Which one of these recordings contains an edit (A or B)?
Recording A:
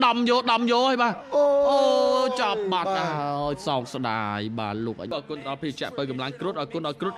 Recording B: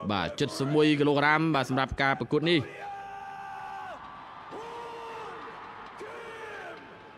A